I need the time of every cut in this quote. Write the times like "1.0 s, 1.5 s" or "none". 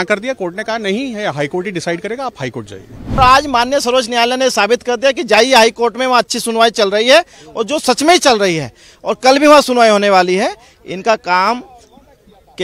3.2 s

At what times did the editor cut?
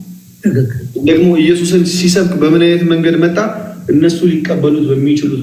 none

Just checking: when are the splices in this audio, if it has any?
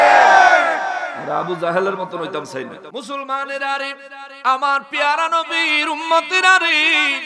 2.8 s

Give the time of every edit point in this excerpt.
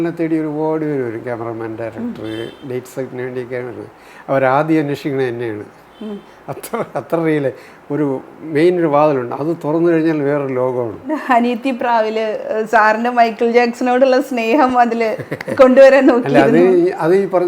11.2 s

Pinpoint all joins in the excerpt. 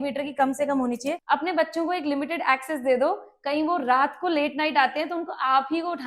1.2 s

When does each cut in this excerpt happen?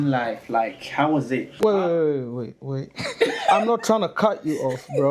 1.5 s

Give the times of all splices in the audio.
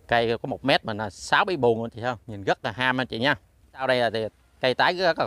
3.8 s

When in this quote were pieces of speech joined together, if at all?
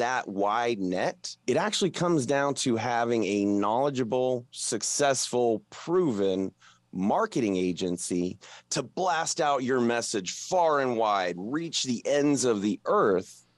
1.3 s

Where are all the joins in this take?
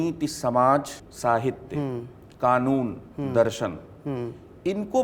1.0 s

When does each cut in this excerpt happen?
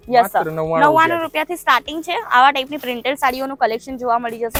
none

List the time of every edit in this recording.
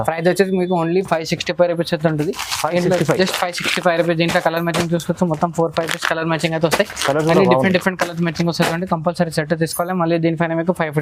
none

